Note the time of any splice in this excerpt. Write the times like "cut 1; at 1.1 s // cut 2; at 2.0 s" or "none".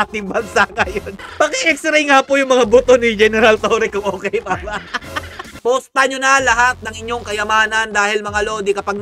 cut 1; at 1.2 s // cut 2; at 5.6 s